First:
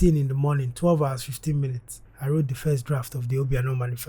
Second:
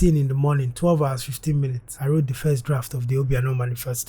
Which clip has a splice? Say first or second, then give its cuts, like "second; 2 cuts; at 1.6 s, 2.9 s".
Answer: second; 1 cut; at 1.8 s